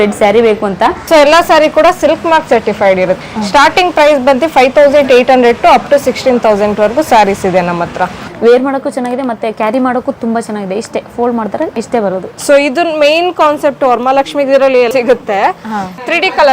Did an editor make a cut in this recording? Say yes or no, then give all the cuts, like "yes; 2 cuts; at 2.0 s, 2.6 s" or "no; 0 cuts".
yes; 5 cuts; at 1.0 s, 3.2 s, 8.2 s, 12.3 s, 14.9 s